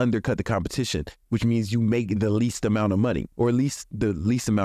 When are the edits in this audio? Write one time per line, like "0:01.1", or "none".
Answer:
0:01.2